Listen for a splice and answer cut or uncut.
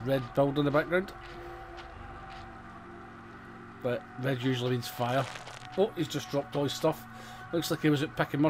uncut